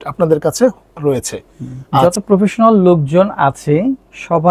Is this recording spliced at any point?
yes; 1 cut; at 1.8 s

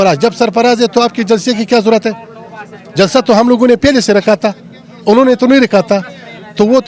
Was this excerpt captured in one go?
yes; 0 cuts

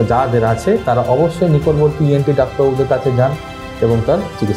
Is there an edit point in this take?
no; 0 cuts

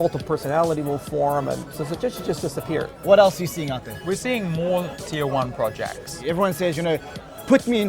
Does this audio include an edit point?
yes; 4 cuts; at 1.7 s, 3.0 s, 3.9 s, 6.2 s

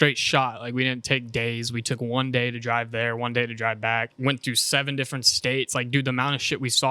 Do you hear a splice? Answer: yes; 1 cut; at 4.1 s

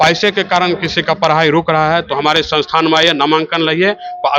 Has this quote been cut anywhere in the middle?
no; 0 cuts

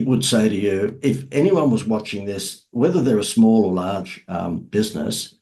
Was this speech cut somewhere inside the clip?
no; 0 cuts

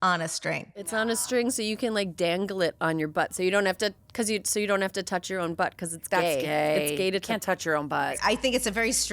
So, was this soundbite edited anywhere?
yes; 2 cuts; at 0.9 s, 8.2 s

